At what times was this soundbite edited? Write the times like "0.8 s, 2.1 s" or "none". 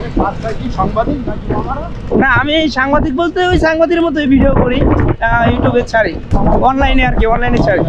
none

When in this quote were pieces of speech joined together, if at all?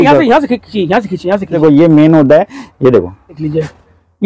1.6 s, 3.4 s

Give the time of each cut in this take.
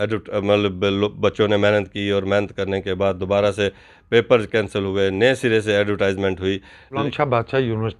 7.0 s

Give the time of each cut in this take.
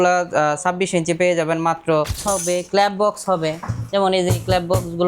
2.2 s

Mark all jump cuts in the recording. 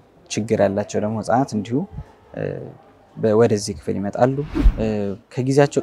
4.7 s

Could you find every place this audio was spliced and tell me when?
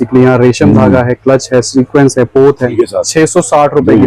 2.7 s

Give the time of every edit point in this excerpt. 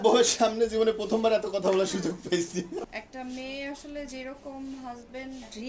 2.9 s

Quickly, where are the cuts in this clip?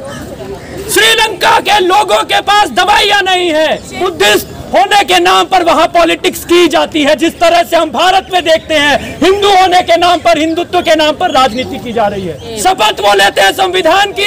3.9 s, 12.4 s

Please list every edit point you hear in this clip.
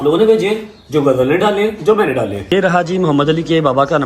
2.5 s

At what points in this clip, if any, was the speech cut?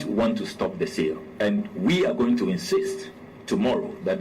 1.3 s

